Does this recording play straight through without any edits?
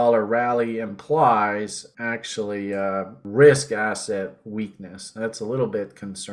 no; 2 cuts; at 1.8 s, 3.2 s

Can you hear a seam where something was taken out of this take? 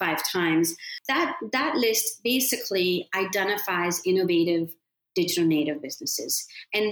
yes; 1 cut; at 0.9 s

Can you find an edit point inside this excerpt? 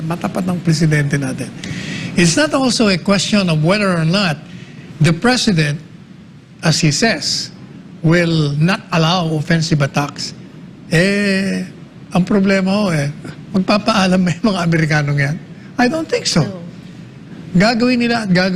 no; 0 cuts

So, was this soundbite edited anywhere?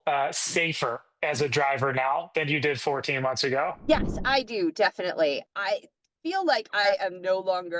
yes; 1 cut; at 3.8 s

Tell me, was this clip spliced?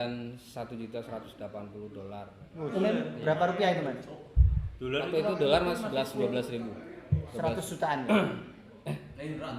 yes; 1 cut; at 2.8 s

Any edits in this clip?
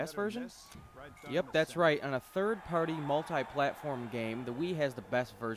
yes; 1 cut; at 4.6 s

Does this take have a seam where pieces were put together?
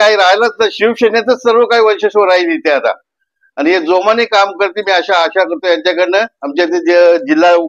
no; 0 cuts

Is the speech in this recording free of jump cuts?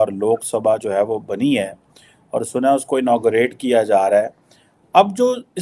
yes; 0 cuts

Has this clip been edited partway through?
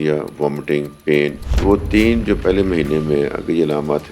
yes; 1 cut; at 1.5 s

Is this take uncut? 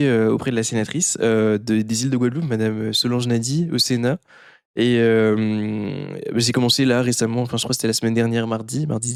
yes; 0 cuts

